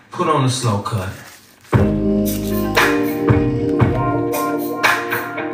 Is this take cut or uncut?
uncut